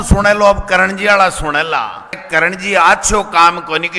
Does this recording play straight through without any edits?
no; 1 cut; at 2.2 s

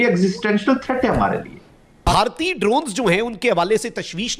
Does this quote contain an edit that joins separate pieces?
yes; 1 cut; at 1.9 s

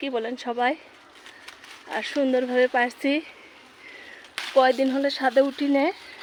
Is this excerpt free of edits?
yes; 0 cuts

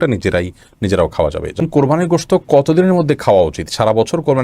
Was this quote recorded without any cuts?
no; 1 cut; at 1.6 s

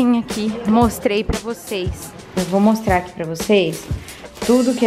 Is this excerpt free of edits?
no; 1 cut; at 2.3 s

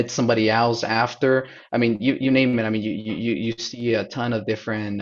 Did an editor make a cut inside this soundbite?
no; 0 cuts

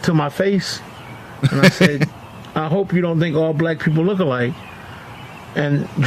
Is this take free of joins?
yes; 0 cuts

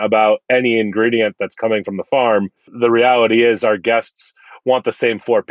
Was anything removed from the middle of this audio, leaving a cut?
yes; 1 cut; at 2.6 s

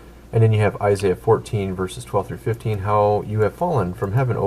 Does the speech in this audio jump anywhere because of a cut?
yes; 1 cut; at 3.5 s

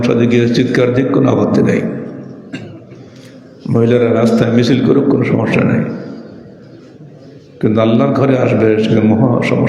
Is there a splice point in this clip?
no; 0 cuts

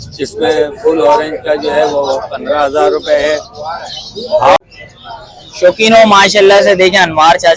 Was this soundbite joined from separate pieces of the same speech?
yes; 1 cut; at 4.6 s

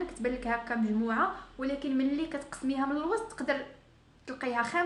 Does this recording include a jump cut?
no; 0 cuts

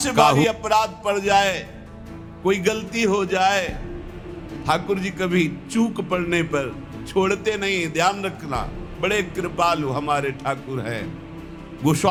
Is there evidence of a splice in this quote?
no; 0 cuts

